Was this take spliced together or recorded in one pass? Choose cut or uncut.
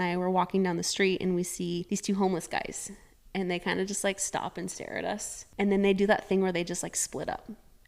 cut